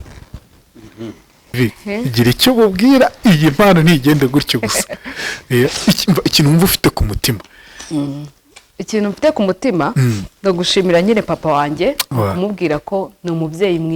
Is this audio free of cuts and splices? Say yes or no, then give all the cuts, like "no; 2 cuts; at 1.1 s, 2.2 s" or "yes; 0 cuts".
no; 1 cut; at 1.6 s